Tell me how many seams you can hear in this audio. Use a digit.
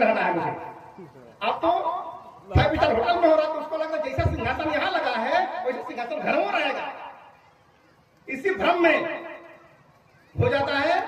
0